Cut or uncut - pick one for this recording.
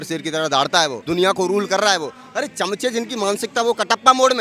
cut